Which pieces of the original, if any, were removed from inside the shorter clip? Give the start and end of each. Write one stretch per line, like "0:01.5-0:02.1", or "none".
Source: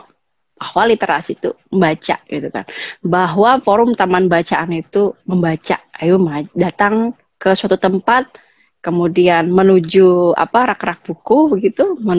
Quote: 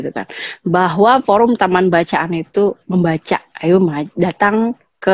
none